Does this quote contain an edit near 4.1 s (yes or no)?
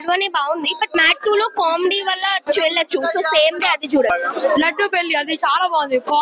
yes